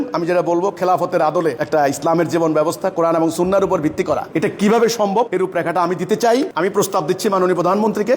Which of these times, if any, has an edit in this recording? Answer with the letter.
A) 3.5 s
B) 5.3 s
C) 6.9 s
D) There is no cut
B